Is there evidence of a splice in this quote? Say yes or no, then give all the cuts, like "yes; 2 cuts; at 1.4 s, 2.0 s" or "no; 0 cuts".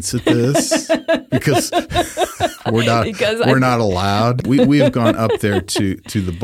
yes; 1 cut; at 4.4 s